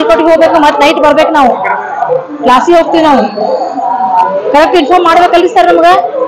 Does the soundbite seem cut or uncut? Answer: uncut